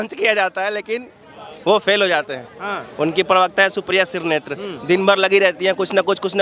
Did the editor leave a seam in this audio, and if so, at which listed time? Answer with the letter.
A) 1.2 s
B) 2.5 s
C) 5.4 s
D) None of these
D